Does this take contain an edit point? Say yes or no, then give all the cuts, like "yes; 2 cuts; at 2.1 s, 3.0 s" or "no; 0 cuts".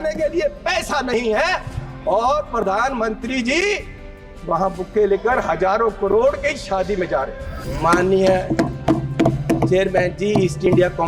yes; 1 cut; at 7.7 s